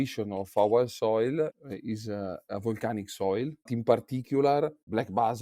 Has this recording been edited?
yes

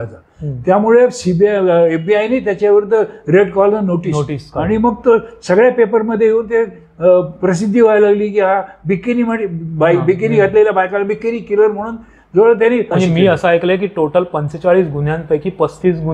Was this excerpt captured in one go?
no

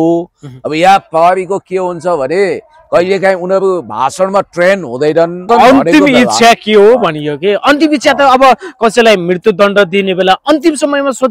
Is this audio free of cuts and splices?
no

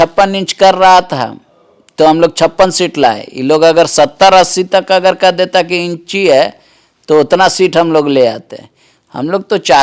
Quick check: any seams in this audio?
no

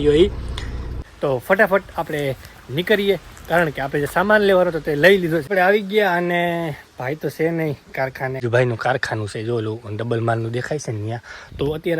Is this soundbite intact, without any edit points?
no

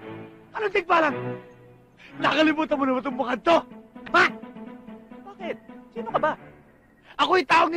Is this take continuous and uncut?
yes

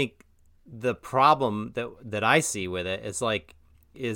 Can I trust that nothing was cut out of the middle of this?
yes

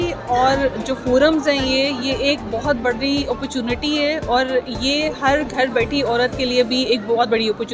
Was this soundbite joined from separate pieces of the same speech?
no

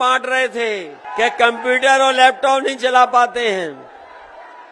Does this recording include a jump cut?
yes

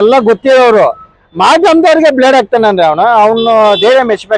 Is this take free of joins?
yes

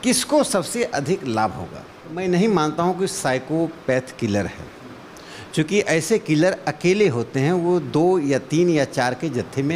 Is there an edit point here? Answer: yes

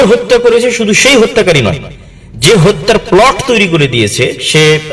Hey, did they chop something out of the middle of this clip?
no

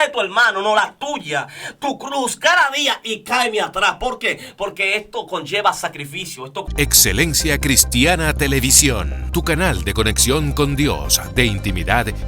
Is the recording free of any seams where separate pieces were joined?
no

